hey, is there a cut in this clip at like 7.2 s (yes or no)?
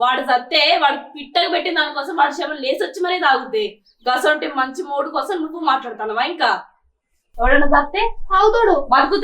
yes